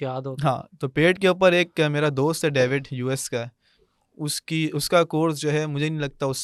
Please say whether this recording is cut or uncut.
uncut